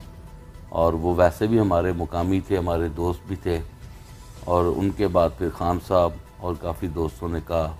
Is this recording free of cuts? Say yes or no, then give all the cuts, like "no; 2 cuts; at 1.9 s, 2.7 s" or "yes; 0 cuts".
yes; 0 cuts